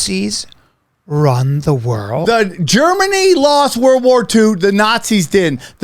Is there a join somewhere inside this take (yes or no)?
yes